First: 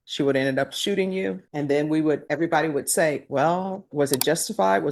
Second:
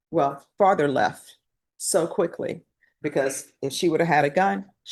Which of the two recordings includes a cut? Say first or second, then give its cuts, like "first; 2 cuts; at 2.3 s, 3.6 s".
first; 2 cuts; at 1.4 s, 2.3 s